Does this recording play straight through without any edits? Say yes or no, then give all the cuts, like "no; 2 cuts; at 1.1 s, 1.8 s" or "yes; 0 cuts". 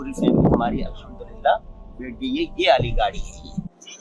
yes; 0 cuts